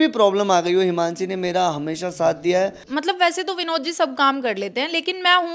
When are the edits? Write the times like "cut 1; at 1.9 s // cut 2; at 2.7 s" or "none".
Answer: cut 1; at 2.8 s